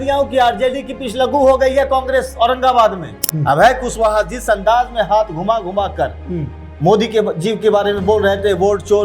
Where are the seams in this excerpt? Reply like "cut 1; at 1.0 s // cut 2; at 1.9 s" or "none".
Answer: cut 1; at 3.3 s